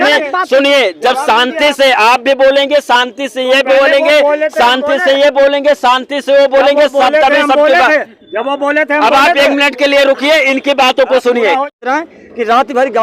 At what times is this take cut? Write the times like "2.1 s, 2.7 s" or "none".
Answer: 11.7 s